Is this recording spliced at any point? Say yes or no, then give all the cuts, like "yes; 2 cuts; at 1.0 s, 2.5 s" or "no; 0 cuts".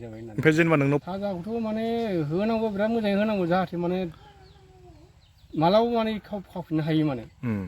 yes; 1 cut; at 1.1 s